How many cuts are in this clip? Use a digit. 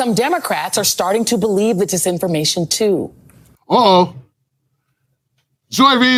0